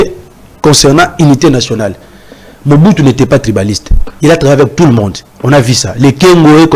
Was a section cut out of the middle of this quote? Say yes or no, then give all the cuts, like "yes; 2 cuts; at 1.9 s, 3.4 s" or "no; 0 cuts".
no; 0 cuts